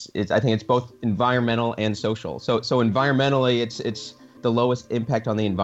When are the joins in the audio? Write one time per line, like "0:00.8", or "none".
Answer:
0:04.3

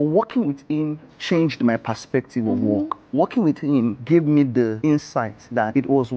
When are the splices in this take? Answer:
0:01.1
0:03.1
0:04.0
0:05.0

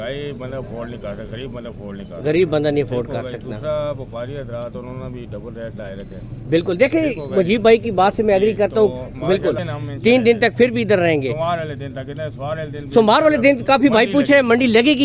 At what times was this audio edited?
0:09.6

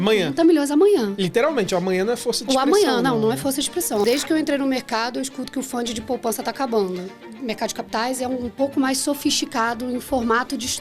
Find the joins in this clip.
0:04.0
0:07.3

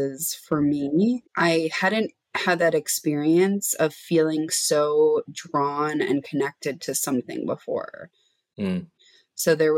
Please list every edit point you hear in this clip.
0:01.3
0:08.9

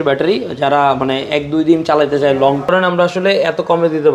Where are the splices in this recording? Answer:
0:02.7

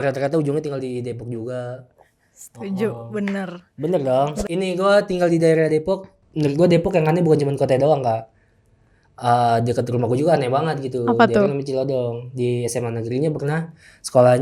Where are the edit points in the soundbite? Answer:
0:04.4

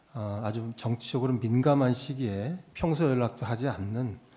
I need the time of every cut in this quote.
0:02.6

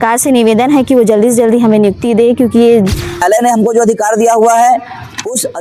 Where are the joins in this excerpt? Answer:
0:03.2

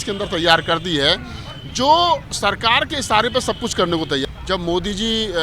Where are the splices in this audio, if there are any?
0:04.2

